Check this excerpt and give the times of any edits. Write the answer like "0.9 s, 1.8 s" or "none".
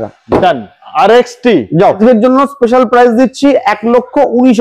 2.0 s